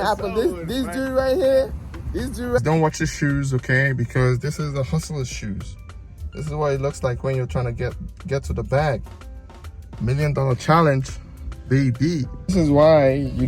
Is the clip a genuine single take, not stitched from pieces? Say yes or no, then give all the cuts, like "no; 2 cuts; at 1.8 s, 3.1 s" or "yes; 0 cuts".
no; 1 cut; at 2.6 s